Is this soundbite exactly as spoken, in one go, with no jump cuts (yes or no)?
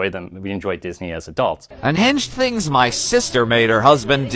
no